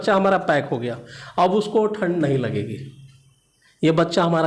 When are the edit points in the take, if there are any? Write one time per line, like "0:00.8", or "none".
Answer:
none